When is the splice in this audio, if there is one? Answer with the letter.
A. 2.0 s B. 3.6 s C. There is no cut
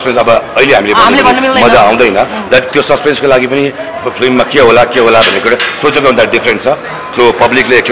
C